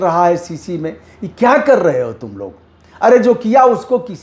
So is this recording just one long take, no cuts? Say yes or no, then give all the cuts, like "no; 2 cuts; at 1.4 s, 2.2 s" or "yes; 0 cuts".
yes; 0 cuts